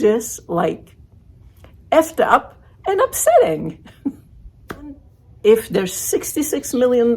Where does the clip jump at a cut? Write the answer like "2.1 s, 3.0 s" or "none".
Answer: 5.3 s